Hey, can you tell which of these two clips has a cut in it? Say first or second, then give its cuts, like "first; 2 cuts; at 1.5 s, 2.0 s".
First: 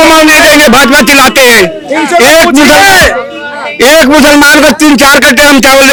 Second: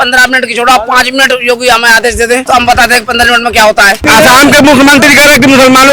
second; 2 cuts; at 2.4 s, 4.0 s